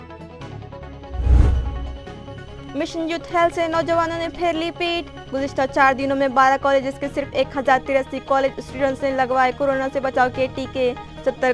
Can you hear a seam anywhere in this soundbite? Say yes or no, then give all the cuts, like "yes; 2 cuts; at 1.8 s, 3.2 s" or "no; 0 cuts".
yes; 1 cut; at 2.3 s